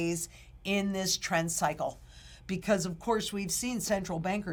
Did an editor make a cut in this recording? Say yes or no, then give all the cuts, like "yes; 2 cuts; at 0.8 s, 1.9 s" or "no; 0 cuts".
no; 0 cuts